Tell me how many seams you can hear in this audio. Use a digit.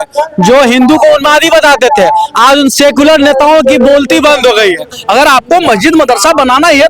1